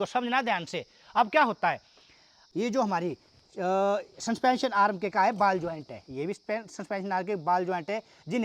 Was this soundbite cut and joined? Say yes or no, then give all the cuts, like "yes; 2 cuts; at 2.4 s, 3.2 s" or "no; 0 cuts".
yes; 1 cut; at 2.4 s